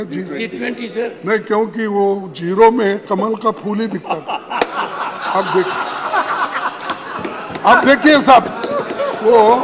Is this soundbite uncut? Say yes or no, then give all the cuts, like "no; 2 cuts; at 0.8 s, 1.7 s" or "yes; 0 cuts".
yes; 0 cuts